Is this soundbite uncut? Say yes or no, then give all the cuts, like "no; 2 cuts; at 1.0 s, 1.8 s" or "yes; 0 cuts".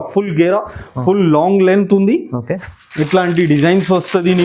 yes; 0 cuts